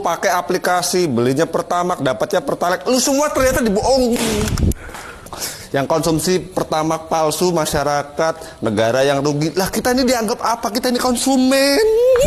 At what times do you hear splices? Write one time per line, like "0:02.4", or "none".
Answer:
none